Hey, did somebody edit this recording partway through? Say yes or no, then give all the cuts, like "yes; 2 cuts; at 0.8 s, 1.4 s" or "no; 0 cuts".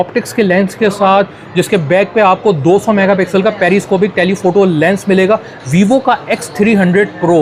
no; 0 cuts